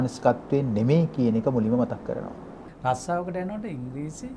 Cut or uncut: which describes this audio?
cut